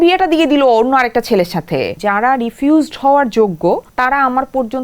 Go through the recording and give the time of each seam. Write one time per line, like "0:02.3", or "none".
0:01.9
0:03.9